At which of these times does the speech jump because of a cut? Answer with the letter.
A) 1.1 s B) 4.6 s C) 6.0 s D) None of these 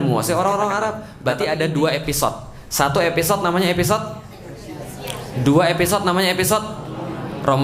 A